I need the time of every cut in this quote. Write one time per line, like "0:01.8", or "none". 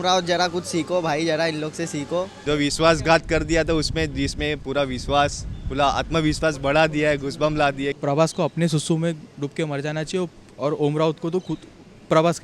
0:02.4
0:08.0